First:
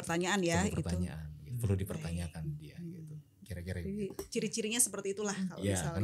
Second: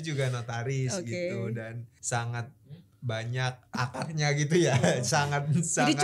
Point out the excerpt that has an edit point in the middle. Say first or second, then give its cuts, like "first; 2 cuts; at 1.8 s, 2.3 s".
second; 2 cuts; at 1.9 s, 3.8 s